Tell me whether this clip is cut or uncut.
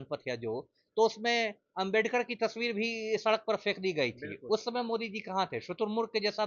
uncut